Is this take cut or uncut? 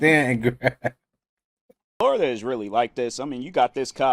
cut